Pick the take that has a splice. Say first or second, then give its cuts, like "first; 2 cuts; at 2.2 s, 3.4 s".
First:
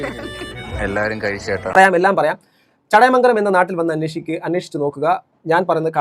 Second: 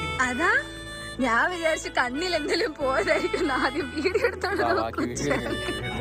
first; 1 cut; at 1.6 s